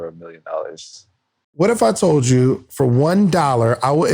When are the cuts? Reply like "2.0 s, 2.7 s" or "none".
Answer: 1.4 s